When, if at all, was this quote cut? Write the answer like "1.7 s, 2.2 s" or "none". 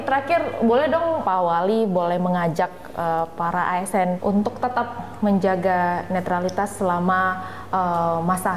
1.2 s, 4.2 s